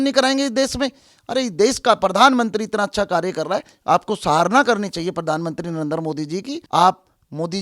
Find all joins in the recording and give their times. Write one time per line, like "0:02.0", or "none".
0:06.6